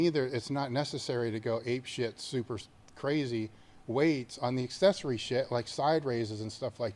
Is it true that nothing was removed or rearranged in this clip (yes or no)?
yes